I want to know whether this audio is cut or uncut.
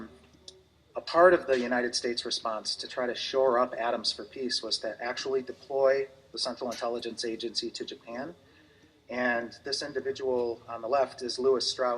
cut